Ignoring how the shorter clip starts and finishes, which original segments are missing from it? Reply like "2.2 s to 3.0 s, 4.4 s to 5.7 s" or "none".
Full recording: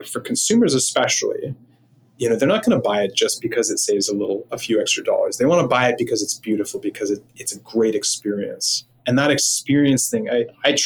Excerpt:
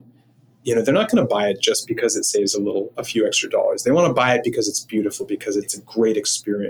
7.3 s to 7.6 s